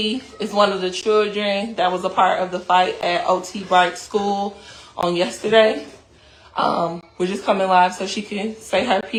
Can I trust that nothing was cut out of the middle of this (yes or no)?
yes